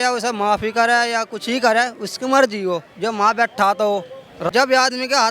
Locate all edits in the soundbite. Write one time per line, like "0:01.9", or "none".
0:04.4